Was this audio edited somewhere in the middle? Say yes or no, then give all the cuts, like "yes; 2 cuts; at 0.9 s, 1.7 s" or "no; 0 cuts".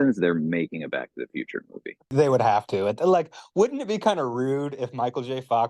yes; 1 cut; at 2.1 s